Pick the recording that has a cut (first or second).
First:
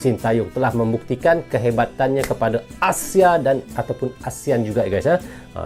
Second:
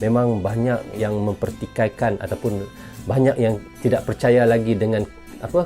second